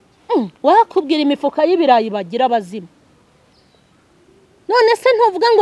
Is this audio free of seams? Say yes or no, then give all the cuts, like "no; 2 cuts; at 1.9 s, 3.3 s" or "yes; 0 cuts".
yes; 0 cuts